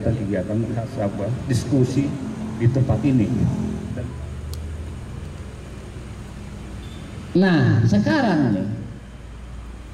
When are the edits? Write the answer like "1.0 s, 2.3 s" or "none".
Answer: 3.8 s